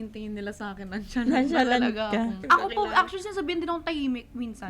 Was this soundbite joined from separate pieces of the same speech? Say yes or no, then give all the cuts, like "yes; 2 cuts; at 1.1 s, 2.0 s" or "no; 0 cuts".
yes; 1 cut; at 2.4 s